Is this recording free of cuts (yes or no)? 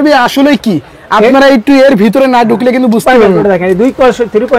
no